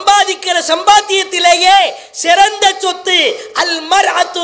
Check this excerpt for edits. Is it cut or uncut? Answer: uncut